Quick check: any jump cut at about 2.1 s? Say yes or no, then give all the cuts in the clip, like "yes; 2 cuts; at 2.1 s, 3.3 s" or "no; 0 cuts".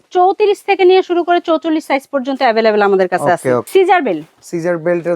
no; 1 cut; at 3.7 s